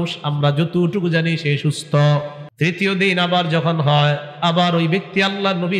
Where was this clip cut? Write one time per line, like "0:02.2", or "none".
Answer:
0:02.4